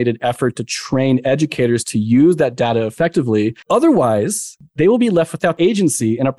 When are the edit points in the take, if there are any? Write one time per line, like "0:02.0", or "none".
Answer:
0:03.6
0:04.6